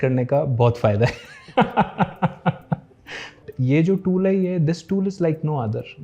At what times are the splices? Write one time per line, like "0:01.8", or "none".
0:03.4